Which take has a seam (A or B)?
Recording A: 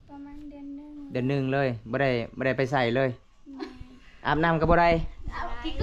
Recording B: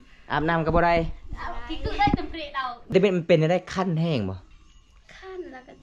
B